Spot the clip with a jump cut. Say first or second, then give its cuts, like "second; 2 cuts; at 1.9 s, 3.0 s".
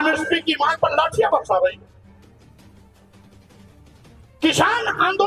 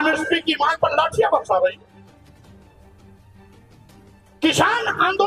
first; 2 cuts; at 1.9 s, 4.4 s